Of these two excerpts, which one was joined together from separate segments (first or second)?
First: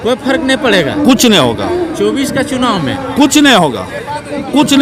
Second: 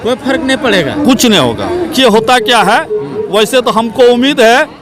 second